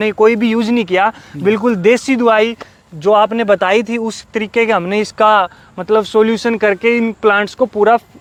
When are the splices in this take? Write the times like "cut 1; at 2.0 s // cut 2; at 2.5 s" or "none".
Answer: none